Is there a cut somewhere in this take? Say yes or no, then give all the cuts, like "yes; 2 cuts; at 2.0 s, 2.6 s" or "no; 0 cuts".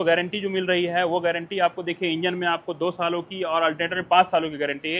no; 0 cuts